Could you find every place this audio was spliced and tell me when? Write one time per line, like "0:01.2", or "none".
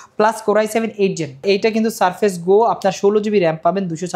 0:01.4